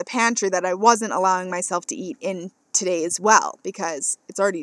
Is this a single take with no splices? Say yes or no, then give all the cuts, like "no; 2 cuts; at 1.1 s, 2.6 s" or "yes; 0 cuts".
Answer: yes; 0 cuts